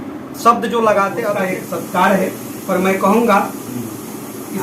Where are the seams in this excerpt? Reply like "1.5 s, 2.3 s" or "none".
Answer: 1.2 s